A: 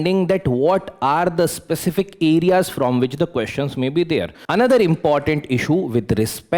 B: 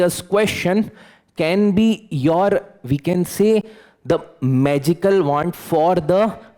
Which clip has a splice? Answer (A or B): A